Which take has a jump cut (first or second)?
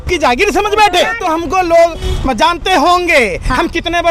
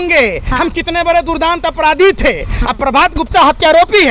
first